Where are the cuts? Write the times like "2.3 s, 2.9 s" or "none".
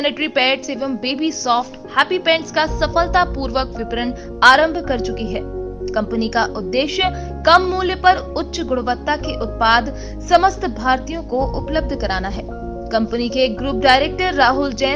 none